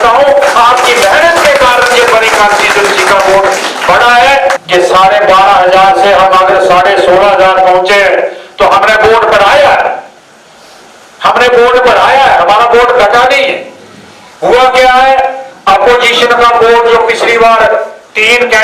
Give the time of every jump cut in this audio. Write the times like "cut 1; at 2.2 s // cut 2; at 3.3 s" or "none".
cut 1; at 4.6 s